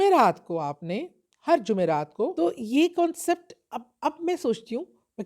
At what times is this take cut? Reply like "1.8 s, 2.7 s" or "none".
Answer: 2.3 s